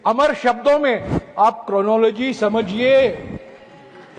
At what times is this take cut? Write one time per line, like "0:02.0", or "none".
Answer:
none